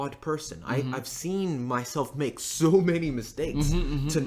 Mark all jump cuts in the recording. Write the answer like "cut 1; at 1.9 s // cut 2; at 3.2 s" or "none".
none

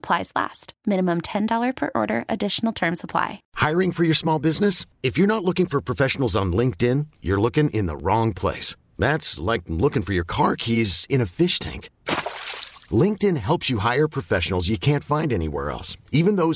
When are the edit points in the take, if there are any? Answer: cut 1; at 3.4 s

